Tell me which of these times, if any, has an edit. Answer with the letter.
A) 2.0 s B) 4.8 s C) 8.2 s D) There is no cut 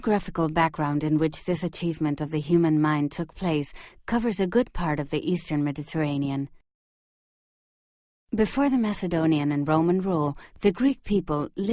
A